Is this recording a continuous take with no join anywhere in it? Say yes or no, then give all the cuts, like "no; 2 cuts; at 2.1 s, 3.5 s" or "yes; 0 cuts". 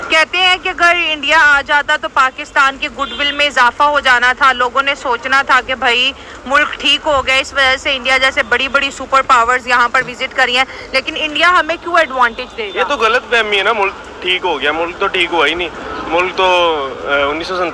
yes; 0 cuts